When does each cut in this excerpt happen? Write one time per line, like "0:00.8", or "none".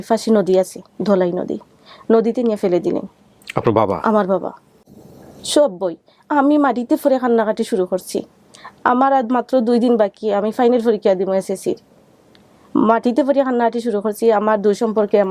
none